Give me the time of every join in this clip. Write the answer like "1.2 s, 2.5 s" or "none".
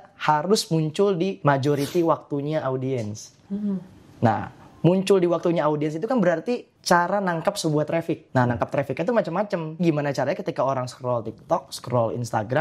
1.4 s, 6.7 s, 8.2 s, 9.8 s